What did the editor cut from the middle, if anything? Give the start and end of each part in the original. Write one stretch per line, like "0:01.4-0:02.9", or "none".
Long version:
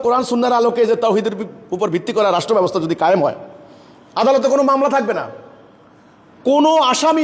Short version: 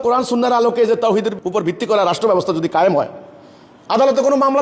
0:01.4-0:01.6